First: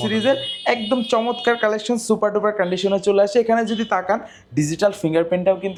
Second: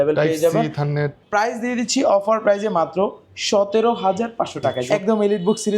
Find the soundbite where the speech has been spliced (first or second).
second